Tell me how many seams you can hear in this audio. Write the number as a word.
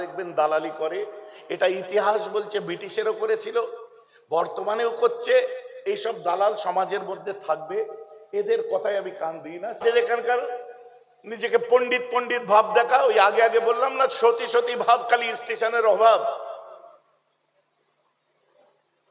one